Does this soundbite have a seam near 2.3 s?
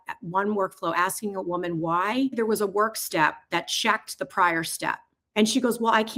yes; 2 cuts; at 2.3 s, 5.1 s

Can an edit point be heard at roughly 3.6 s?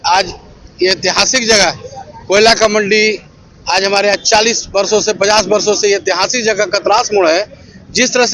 no; 0 cuts

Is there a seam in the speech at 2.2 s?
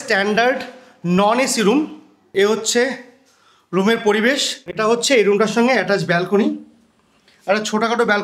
yes; 2 cuts; at 2.2 s, 4.8 s

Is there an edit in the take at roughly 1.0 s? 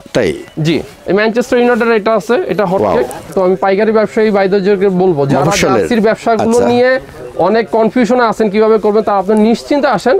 no; 1 cut; at 3.3 s

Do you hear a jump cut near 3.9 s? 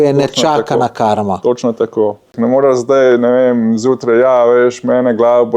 no; 1 cut; at 2.3 s

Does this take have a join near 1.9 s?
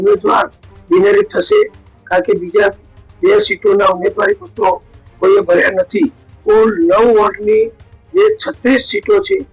no; 1 cut; at 6.3 s

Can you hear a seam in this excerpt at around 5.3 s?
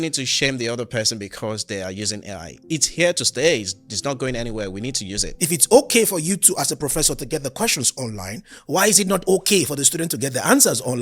yes; 1 cut; at 5.3 s

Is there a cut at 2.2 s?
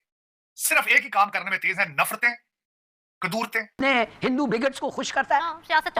no; 1 cut; at 3.8 s

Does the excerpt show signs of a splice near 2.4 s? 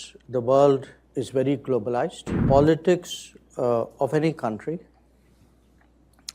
yes; 1 cut; at 2.4 s

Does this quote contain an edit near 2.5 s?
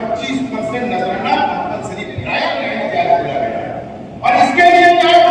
yes; 1 cut; at 2.5 s

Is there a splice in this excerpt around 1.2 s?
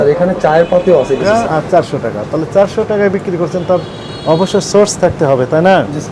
yes; 1 cut; at 1.2 s

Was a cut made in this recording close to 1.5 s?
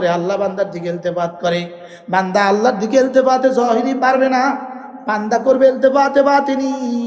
no; 0 cuts

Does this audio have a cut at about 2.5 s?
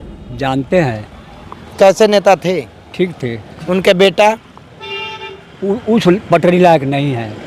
no; 0 cuts

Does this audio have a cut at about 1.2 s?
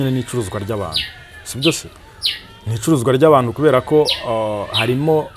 no; 0 cuts

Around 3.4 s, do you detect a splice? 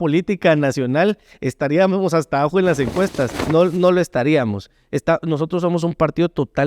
yes; 1 cut; at 3.4 s

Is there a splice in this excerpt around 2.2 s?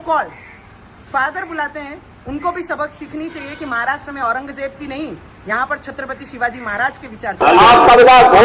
no; 1 cut; at 7.4 s

